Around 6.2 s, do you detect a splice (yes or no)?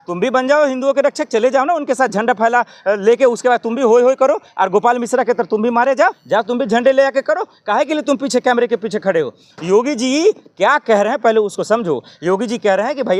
yes